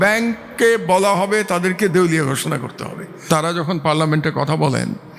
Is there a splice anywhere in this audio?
yes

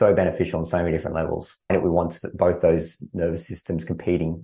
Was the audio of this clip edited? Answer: yes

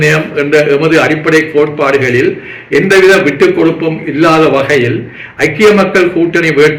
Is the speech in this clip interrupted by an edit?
no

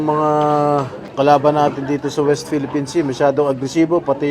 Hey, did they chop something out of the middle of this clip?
yes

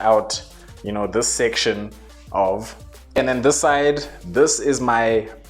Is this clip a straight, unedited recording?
no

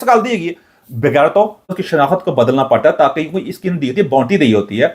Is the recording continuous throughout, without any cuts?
no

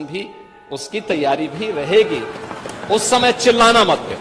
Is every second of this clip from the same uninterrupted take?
yes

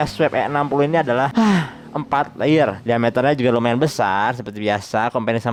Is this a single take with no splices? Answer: yes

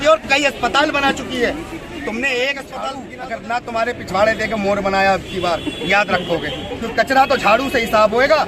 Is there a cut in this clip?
yes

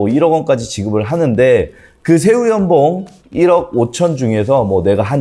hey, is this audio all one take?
yes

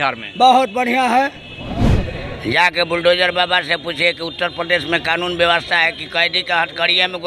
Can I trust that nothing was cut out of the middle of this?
yes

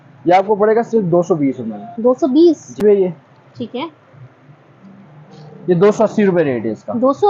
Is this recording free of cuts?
no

